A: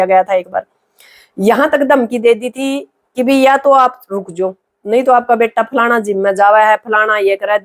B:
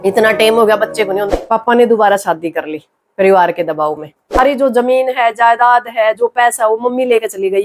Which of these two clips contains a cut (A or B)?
B